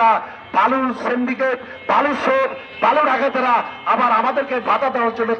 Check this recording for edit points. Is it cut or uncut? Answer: uncut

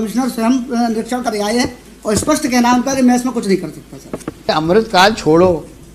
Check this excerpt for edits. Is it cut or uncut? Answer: cut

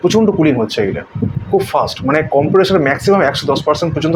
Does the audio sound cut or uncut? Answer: uncut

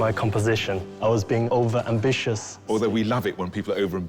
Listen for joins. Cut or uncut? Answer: cut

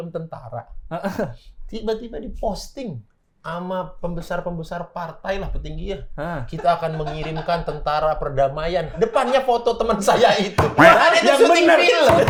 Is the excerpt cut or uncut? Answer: uncut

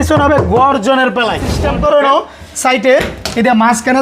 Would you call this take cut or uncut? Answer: cut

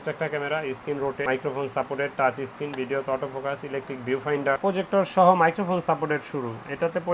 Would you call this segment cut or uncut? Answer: cut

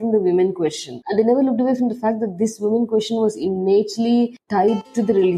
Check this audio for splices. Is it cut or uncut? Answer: cut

